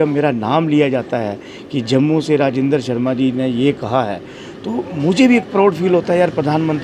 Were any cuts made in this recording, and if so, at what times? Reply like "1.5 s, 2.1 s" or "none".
none